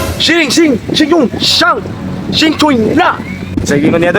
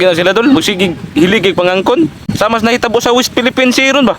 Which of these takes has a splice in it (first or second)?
second